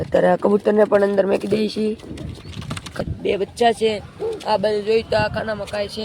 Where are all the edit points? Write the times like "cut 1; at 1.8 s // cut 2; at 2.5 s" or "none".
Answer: cut 1; at 3.0 s